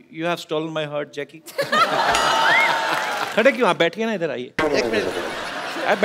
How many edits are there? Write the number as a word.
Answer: one